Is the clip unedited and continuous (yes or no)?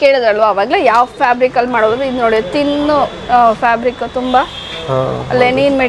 yes